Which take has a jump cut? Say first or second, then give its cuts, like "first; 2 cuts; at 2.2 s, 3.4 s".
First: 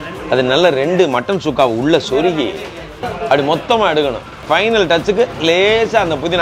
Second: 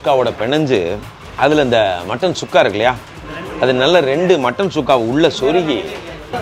first; 1 cut; at 4.3 s